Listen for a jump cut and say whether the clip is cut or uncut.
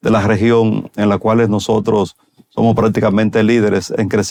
uncut